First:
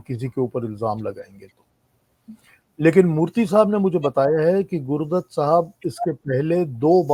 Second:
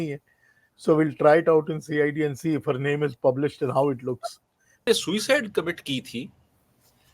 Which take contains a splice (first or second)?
second